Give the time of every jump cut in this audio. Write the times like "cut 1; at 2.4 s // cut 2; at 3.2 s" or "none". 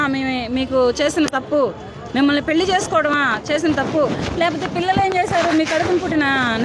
none